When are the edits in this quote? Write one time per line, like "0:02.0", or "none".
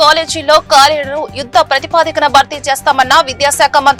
none